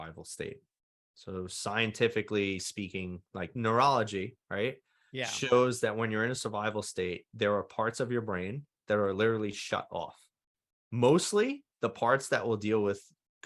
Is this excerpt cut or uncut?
cut